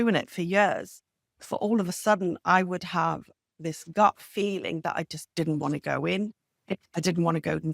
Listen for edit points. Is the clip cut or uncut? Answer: uncut